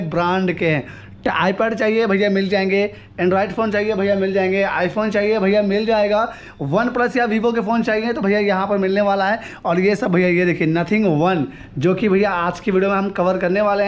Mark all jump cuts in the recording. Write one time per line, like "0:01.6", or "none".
none